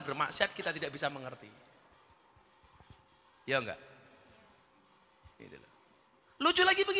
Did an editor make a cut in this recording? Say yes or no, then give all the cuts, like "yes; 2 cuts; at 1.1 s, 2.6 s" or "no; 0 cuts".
no; 0 cuts